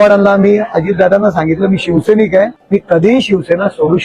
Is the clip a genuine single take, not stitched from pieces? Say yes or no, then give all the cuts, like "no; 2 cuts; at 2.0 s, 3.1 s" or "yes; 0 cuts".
no; 1 cut; at 2.6 s